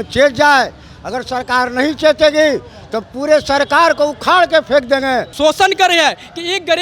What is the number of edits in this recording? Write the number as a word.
one